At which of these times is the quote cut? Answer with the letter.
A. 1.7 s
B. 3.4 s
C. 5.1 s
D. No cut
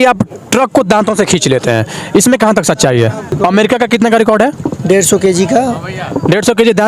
B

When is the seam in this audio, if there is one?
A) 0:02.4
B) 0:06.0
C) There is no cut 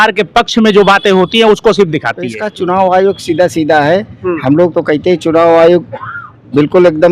A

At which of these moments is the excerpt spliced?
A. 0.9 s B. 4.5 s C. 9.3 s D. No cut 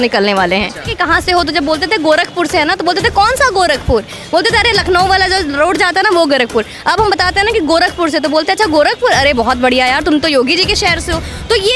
A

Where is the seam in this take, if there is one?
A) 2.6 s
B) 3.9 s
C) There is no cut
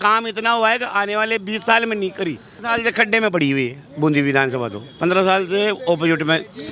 A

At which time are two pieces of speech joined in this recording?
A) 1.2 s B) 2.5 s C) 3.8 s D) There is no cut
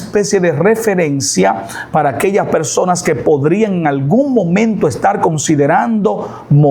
D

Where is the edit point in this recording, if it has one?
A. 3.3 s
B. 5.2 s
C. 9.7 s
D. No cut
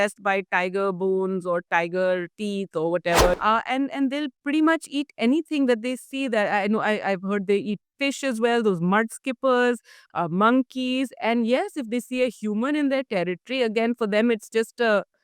A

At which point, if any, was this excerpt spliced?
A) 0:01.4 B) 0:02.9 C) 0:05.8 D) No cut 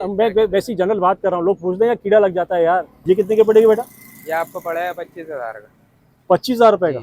B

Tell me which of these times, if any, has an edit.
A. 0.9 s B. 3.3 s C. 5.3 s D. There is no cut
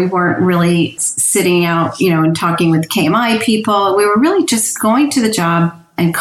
A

